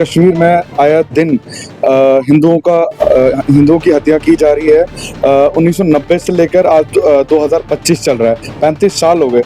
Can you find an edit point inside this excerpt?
no; 0 cuts

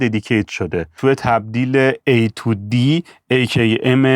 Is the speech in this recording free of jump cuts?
no; 1 cut; at 1.0 s

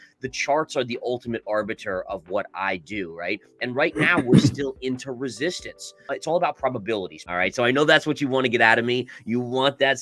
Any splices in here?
yes; 2 cuts; at 6.0 s, 7.2 s

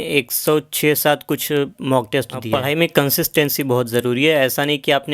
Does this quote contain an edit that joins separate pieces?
yes; 1 cut; at 2.4 s

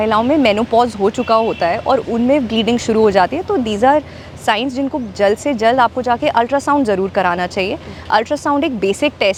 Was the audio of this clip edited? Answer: no; 0 cuts

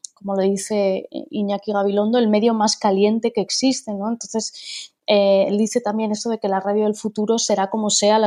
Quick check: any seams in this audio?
no; 0 cuts

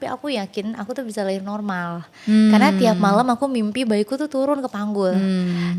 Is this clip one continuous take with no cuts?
yes; 0 cuts

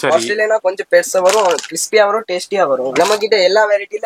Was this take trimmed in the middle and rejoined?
yes; 1 cut; at 2.9 s

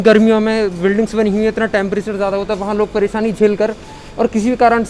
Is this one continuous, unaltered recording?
yes; 0 cuts

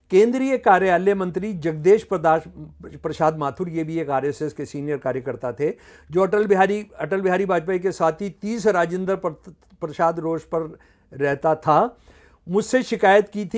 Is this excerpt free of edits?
yes; 0 cuts

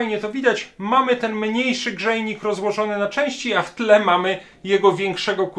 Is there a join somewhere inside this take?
no; 0 cuts

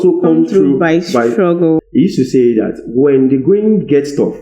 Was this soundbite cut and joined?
yes; 1 cut; at 1.8 s

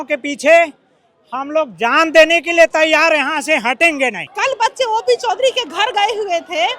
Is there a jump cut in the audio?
yes; 1 cut; at 4.2 s

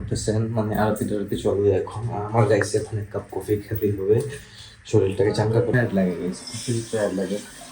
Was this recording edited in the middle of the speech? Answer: yes; 1 cut; at 5.7 s

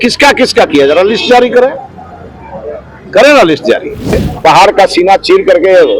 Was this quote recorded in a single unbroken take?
no; 1 cut; at 4.3 s

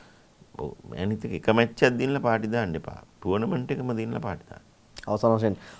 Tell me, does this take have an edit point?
no; 0 cuts

